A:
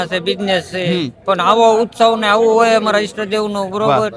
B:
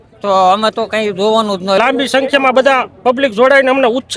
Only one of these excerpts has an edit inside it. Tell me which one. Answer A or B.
B